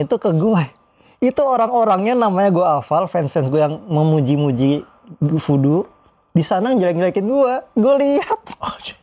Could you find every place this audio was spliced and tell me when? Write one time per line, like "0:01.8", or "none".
none